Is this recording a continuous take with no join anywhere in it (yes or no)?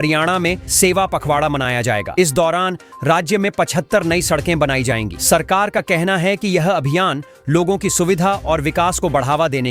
yes